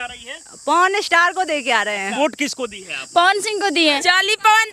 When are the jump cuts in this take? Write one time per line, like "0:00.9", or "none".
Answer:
0:02.1
0:04.0